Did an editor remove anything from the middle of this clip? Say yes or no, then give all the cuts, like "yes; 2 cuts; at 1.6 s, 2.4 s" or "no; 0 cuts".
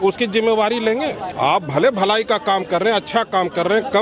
yes; 1 cut; at 1.3 s